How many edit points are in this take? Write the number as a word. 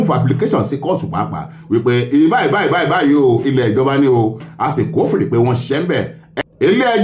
zero